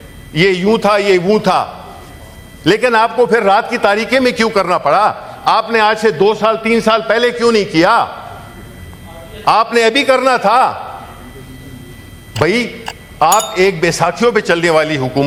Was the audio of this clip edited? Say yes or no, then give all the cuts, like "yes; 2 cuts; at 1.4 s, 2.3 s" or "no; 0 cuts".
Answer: no; 0 cuts